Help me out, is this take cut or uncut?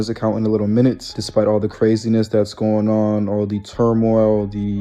cut